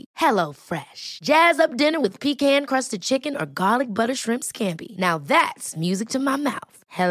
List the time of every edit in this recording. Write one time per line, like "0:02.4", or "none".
none